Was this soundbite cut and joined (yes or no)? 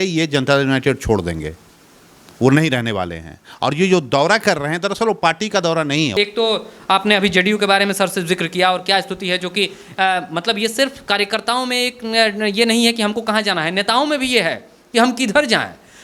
yes